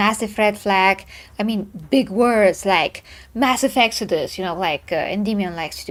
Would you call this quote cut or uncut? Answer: uncut